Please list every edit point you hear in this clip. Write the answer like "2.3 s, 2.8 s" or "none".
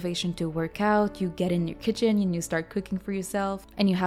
none